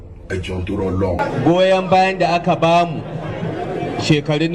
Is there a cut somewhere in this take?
yes; 1 cut; at 1.3 s

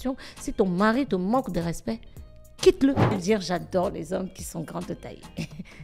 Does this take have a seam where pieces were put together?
yes; 1 cut; at 3.2 s

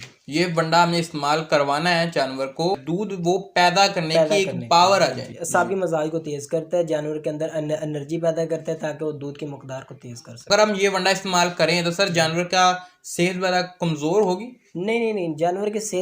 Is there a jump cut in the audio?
yes; 3 cuts; at 2.8 s, 5.3 s, 10.4 s

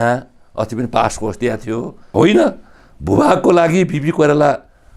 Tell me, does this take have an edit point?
yes; 1 cut; at 2.1 s

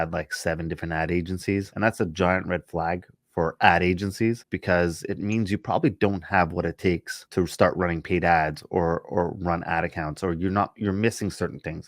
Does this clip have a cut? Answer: yes; 3 cuts; at 1.7 s, 4.5 s, 7.1 s

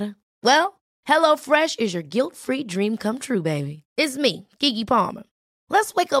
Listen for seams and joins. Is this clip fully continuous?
yes; 0 cuts

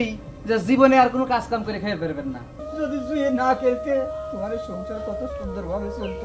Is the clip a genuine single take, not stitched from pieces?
no; 1 cut; at 2.6 s

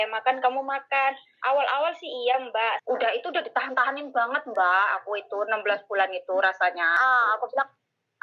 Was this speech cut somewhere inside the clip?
yes; 2 cuts; at 2.8 s, 6.9 s

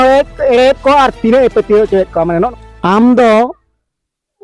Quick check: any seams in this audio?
yes; 1 cut; at 2.5 s

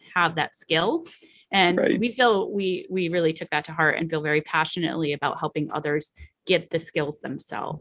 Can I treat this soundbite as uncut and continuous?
yes; 0 cuts

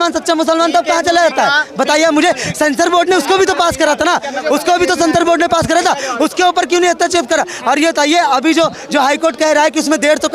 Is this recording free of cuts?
yes; 0 cuts

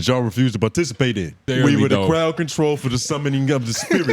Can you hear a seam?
yes; 1 cut; at 1.4 s

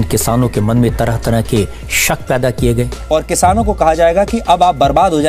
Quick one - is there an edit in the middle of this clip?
no; 0 cuts

